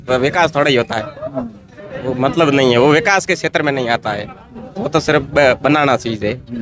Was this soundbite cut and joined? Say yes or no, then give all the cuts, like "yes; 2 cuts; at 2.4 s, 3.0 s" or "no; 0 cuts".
no; 0 cuts